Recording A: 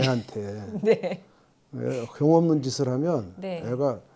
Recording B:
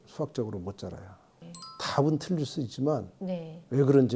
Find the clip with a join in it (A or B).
B